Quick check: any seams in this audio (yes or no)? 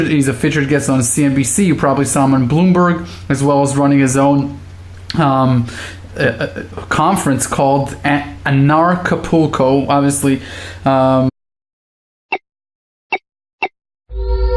no